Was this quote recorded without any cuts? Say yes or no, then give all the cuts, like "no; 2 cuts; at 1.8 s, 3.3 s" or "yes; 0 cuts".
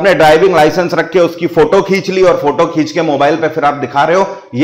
yes; 0 cuts